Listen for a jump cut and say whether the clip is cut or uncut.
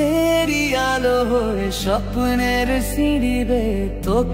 uncut